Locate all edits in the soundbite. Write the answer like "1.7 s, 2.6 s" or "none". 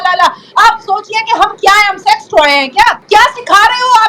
3.0 s